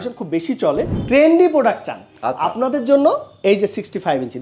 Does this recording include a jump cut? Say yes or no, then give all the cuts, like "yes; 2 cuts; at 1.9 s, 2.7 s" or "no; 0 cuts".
yes; 1 cut; at 1.0 s